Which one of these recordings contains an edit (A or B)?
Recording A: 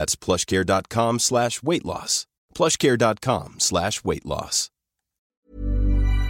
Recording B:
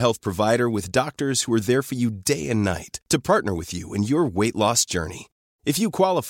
A